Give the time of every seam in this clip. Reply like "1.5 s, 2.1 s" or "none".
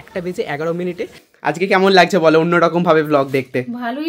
1.2 s

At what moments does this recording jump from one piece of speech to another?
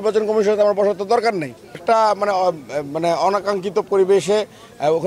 1.8 s

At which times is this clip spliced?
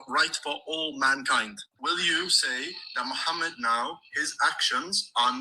1.6 s

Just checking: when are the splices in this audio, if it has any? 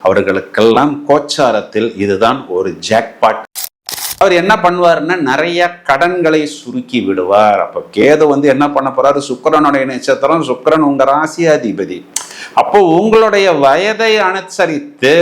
3.8 s

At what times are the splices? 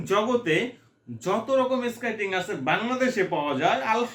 none

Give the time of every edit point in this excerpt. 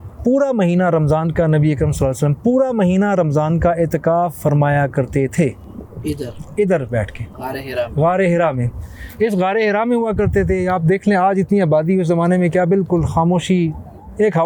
none

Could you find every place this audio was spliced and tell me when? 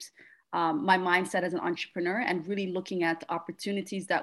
none

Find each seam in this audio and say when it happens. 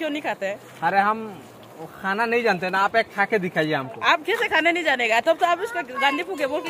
none

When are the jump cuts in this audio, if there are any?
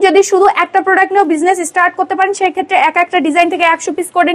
none

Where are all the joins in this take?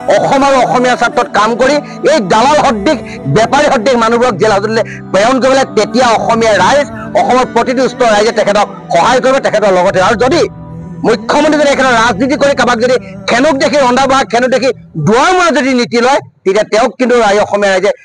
none

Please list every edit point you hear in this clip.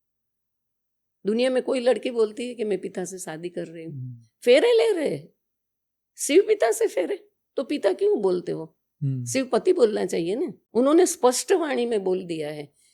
10.6 s

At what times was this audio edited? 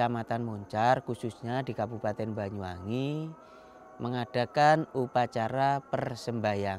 none

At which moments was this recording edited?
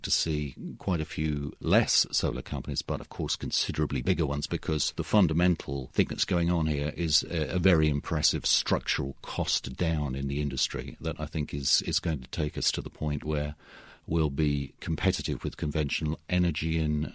none

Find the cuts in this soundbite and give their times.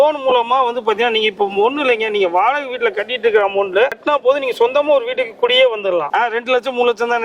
4.0 s, 6.1 s

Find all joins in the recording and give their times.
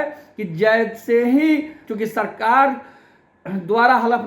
1.8 s

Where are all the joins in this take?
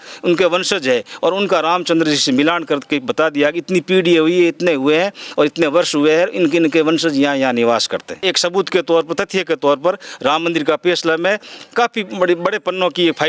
8.2 s

